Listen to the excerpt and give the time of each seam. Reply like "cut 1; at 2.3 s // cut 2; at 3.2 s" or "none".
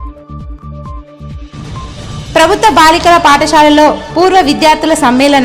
none